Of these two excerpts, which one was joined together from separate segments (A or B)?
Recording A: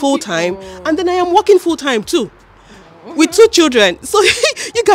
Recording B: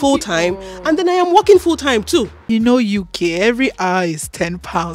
B